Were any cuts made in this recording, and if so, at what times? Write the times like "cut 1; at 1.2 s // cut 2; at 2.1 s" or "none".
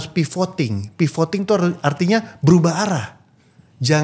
none